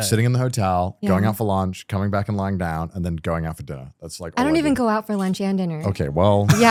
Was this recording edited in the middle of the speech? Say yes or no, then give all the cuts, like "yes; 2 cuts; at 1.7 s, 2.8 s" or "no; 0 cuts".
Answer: no; 0 cuts